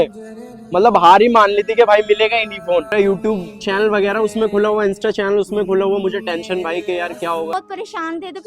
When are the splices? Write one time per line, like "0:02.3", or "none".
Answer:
0:02.9
0:07.5